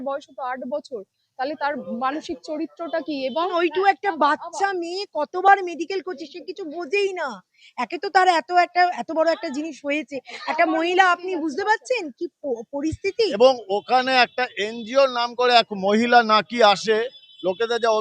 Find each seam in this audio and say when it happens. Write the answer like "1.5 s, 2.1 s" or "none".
3.5 s, 13.3 s